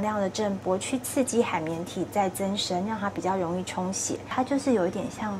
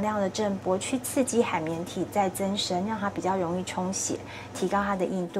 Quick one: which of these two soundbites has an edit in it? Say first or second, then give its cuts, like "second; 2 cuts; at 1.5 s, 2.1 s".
first; 1 cut; at 4.3 s